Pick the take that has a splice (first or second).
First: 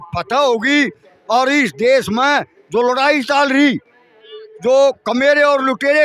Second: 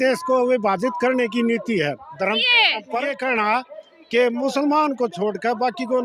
second